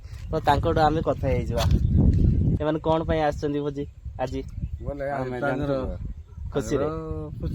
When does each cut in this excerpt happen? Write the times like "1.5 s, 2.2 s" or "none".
2.6 s